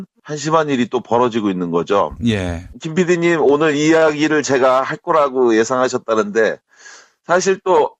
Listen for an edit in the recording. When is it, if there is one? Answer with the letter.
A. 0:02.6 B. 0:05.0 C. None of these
A